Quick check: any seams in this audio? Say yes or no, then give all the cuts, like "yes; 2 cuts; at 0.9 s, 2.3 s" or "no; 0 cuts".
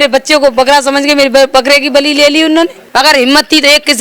yes; 1 cut; at 2.8 s